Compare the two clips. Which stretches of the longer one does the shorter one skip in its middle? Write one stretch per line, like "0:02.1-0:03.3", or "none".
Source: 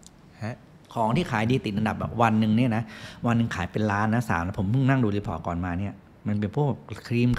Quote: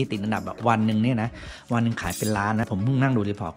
0:04.2-0:04.5